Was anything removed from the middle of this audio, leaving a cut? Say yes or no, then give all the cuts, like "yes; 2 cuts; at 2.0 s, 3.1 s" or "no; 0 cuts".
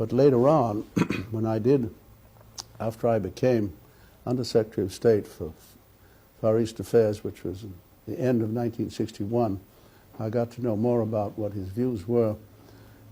yes; 1 cut; at 9.5 s